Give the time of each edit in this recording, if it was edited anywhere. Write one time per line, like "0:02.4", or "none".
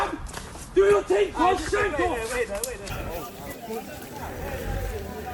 0:02.8